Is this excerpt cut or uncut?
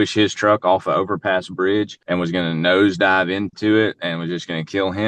cut